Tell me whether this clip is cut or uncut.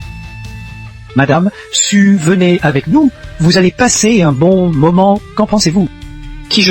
cut